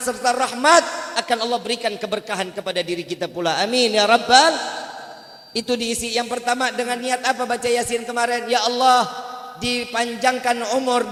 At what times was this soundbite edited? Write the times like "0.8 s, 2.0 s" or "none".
none